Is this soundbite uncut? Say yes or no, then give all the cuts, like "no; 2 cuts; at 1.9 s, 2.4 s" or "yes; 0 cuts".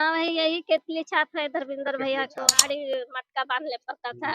no; 1 cut; at 2.5 s